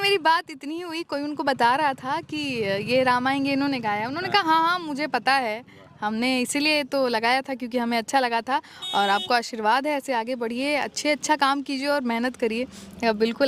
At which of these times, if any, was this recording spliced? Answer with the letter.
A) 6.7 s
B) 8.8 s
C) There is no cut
C